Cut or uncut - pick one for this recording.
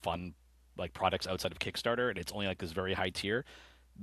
uncut